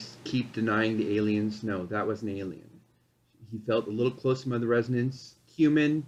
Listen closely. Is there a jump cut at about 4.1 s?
no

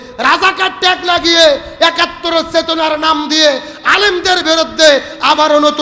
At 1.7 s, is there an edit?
no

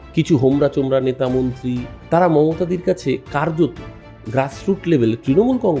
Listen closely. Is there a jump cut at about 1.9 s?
yes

